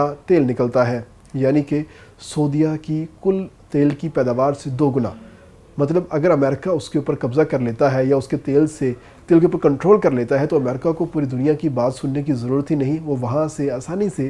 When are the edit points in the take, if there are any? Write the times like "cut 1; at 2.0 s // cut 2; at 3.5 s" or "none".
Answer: none